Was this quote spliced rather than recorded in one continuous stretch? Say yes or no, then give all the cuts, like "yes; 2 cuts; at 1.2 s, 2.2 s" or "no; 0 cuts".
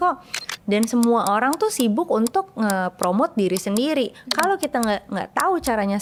no; 0 cuts